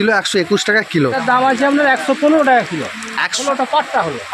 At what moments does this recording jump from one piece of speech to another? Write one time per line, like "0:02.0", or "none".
0:01.2
0:03.4